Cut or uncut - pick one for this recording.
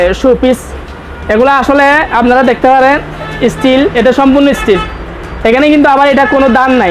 uncut